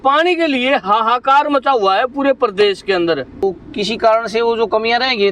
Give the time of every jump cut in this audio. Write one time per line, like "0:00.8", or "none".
0:03.4